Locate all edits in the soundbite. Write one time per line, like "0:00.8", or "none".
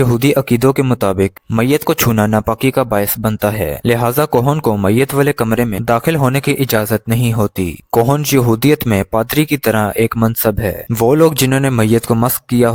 none